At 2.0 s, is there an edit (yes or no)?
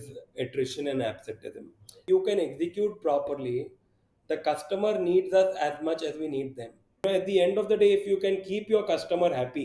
yes